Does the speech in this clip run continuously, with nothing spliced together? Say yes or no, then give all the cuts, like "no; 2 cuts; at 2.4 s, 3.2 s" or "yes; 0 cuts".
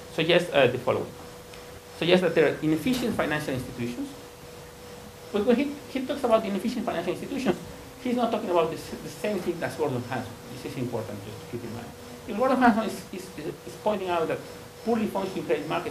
no; 1 cut; at 3.8 s